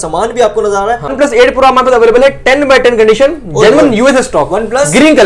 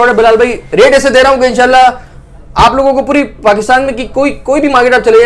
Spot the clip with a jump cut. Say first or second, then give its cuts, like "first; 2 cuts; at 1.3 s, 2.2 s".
first; 1 cut; at 1.1 s